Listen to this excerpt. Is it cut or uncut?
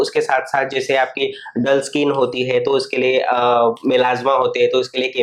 uncut